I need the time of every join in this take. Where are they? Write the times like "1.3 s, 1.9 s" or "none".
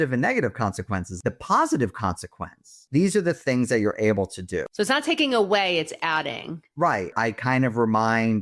1.1 s, 2.8 s, 5.1 s, 7.1 s